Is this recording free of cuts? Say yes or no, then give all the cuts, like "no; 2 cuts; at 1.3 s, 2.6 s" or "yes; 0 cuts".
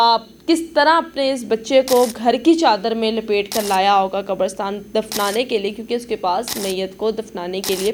yes; 0 cuts